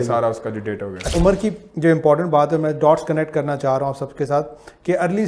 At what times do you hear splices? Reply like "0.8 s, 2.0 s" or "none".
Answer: 1.1 s